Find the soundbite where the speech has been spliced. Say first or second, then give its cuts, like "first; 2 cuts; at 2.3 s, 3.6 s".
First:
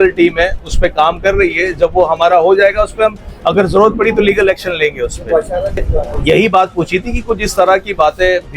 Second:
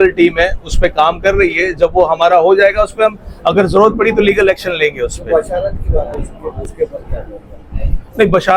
first; 1 cut; at 6.1 s